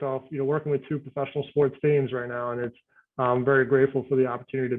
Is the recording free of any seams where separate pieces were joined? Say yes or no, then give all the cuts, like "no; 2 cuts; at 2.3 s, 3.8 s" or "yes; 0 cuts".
yes; 0 cuts